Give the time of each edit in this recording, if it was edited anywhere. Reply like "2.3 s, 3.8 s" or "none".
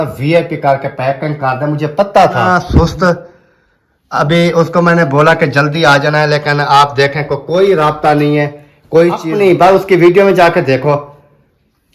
2.6 s, 9.2 s